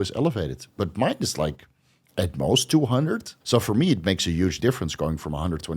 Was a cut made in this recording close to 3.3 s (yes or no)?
yes